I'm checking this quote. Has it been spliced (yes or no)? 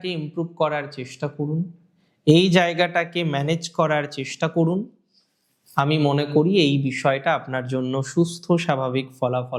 no